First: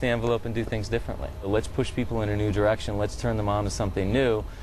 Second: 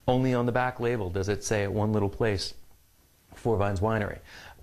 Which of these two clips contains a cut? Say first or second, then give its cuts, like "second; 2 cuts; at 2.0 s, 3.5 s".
second; 1 cut; at 2.7 s